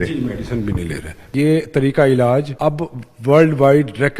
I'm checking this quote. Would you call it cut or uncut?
cut